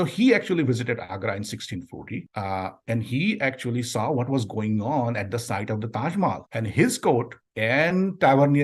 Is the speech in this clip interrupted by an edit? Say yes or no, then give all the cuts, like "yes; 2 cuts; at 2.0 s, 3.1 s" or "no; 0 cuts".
no; 0 cuts